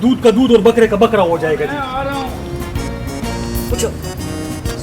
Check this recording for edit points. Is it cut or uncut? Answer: uncut